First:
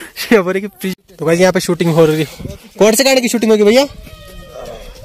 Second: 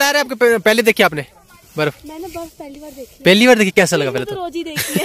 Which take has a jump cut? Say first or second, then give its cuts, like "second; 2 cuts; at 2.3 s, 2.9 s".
first; 1 cut; at 0.9 s